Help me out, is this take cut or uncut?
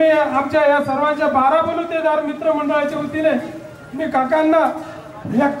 uncut